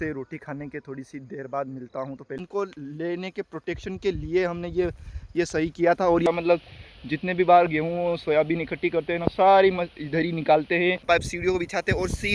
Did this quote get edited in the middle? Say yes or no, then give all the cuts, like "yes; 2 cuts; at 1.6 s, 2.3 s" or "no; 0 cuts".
yes; 3 cuts; at 2.3 s, 6.3 s, 11.0 s